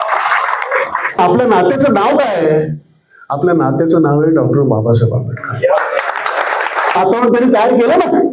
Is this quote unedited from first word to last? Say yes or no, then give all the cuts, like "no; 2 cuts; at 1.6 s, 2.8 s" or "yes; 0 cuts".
no; 2 cuts; at 1.2 s, 7.0 s